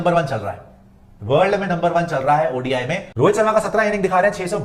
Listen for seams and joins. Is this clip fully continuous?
no; 1 cut; at 3.0 s

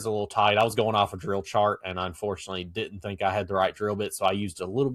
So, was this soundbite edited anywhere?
no; 0 cuts

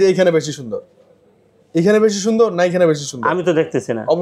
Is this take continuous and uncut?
yes; 0 cuts

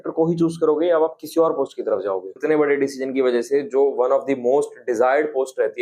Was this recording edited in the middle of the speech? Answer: yes; 1 cut; at 2.4 s

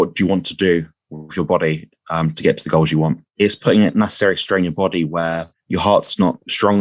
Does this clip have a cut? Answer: yes; 2 cuts; at 3.3 s, 5.5 s

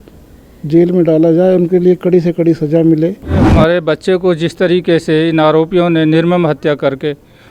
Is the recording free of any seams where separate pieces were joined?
no; 1 cut; at 3.5 s

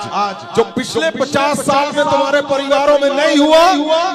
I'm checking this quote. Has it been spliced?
no; 0 cuts

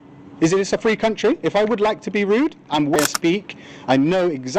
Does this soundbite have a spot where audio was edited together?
yes; 1 cut; at 3.0 s

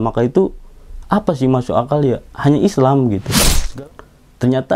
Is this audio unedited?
no; 1 cut; at 3.6 s

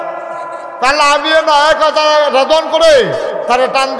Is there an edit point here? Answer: no; 0 cuts

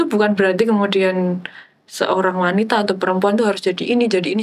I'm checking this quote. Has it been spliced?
no; 0 cuts

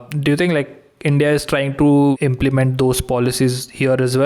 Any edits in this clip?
yes; 1 cut; at 2.2 s

